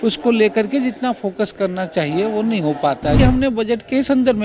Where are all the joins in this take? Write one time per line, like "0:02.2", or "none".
0:03.2